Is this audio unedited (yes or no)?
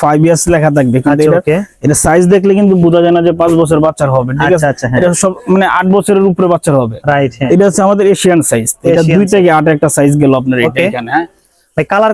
yes